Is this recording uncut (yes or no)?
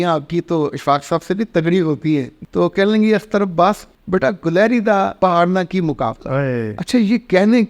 no